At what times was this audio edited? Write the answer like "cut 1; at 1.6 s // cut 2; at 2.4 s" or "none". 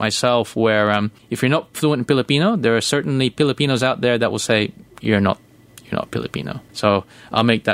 cut 1; at 1.2 s // cut 2; at 6.6 s